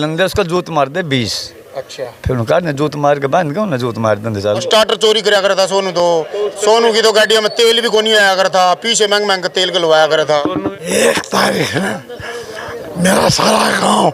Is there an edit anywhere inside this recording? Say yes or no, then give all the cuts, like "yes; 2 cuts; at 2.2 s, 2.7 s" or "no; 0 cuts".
yes; 2 cuts; at 4.6 s, 10.5 s